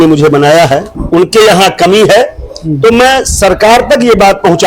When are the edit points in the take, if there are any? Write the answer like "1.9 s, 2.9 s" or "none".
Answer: 1.0 s